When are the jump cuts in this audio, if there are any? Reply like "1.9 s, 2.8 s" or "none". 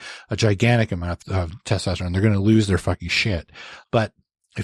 1.1 s

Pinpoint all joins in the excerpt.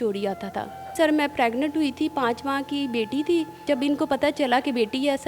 1.0 s, 3.6 s

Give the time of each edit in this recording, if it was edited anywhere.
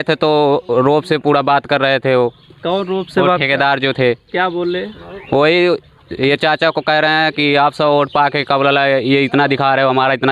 none

